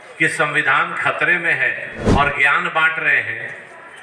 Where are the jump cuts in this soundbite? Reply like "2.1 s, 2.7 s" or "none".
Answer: 2.1 s